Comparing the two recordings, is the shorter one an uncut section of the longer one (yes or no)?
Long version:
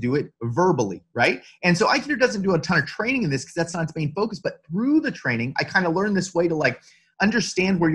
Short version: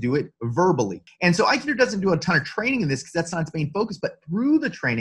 no